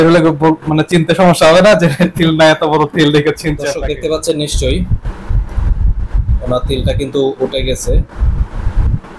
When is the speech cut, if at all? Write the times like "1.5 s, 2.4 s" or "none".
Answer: 3.6 s